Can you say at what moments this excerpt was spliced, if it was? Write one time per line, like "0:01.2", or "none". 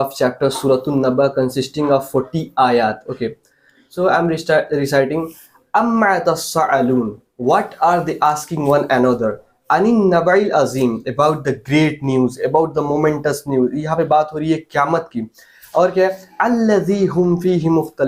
none